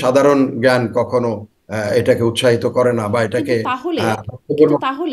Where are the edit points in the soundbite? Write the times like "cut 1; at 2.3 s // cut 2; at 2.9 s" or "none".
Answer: none